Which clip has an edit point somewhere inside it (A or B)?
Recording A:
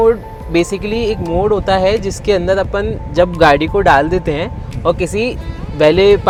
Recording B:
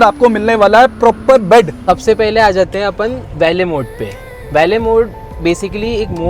B